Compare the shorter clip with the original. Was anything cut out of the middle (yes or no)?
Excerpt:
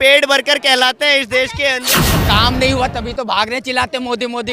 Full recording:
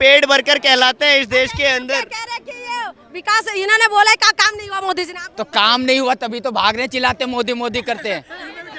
yes